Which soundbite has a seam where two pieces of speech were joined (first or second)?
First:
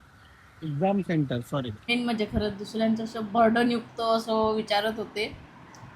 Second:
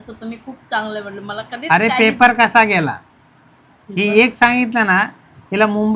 first